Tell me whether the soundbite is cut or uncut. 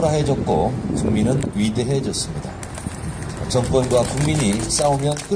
cut